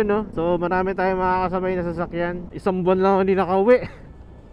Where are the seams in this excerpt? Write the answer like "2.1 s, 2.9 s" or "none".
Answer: 2.4 s